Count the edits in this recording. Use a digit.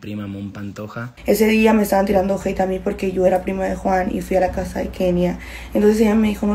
1